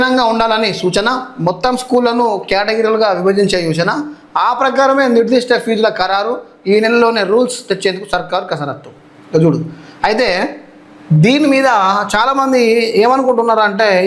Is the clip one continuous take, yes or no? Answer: yes